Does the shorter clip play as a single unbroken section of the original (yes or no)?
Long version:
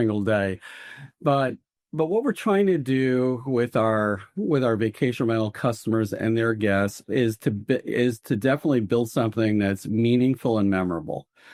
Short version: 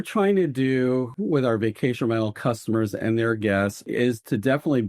no